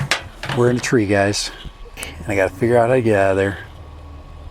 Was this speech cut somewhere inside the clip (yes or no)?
yes